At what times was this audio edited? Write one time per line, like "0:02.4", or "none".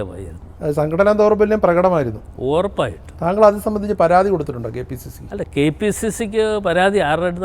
none